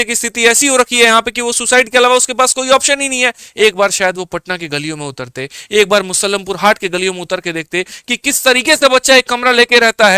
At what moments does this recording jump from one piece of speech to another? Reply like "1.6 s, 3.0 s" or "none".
3.4 s